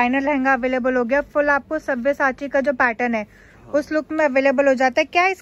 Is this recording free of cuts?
yes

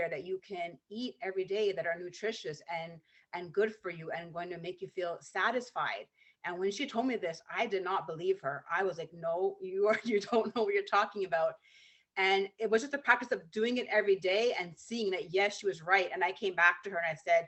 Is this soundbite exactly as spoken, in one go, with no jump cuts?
yes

